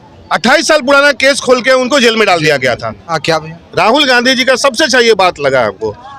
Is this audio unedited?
no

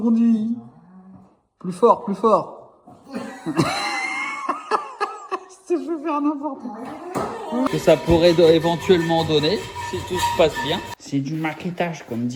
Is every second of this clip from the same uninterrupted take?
no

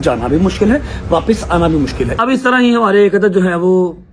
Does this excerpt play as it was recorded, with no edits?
no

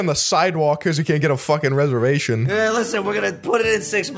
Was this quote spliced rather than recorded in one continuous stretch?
no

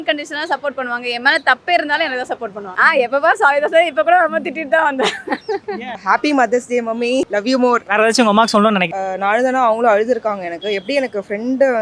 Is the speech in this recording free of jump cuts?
no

